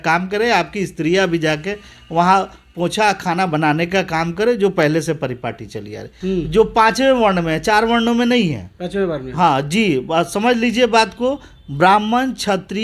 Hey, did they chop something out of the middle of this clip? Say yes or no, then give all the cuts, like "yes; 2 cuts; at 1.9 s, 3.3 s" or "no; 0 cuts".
yes; 1 cut; at 6.1 s